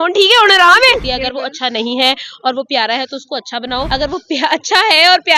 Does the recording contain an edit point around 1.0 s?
yes; 2 cuts; at 1.0 s, 3.9 s

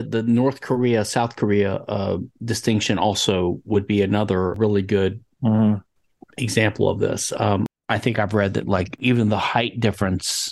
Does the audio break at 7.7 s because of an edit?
yes; 3 cuts; at 4.6 s, 7.7 s, 9.0 s

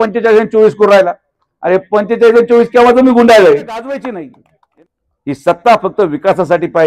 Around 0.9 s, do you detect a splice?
no; 1 cut; at 3.9 s

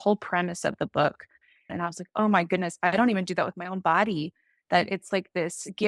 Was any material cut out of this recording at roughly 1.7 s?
yes; 1 cut; at 1.7 s

